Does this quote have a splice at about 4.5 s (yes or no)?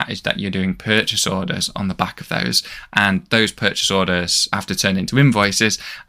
yes